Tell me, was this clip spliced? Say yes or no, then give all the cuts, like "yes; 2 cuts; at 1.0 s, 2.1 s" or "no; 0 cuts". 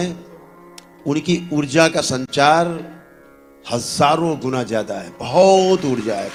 no; 0 cuts